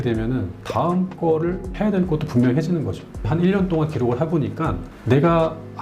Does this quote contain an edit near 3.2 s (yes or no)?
yes